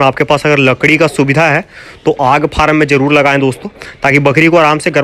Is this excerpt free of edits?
yes; 0 cuts

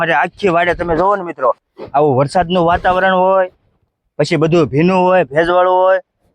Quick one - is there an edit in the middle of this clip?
yes; 1 cut; at 1.7 s

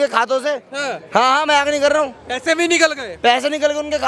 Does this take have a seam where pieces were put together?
no; 0 cuts

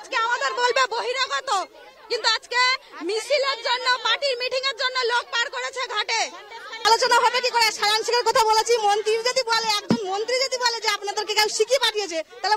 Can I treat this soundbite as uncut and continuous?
no; 1 cut; at 6.7 s

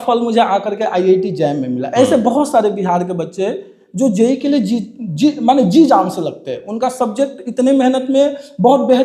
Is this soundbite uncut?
yes; 0 cuts

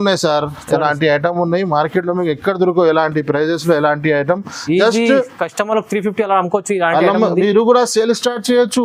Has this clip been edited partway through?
no; 0 cuts

